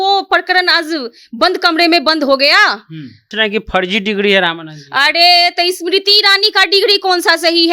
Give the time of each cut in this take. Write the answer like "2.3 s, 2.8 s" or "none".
3.2 s